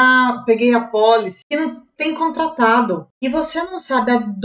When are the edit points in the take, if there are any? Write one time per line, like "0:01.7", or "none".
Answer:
0:01.4
0:03.1